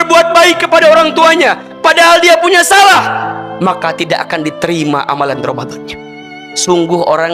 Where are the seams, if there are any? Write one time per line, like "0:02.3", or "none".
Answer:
0:06.2